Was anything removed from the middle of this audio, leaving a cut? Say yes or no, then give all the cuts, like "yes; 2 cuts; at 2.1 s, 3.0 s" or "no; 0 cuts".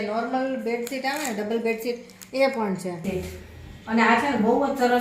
yes; 1 cut; at 3.0 s